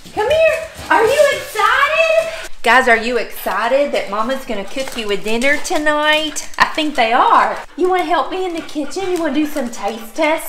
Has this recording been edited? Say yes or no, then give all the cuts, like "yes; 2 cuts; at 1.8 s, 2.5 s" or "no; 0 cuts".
yes; 2 cuts; at 2.4 s, 7.6 s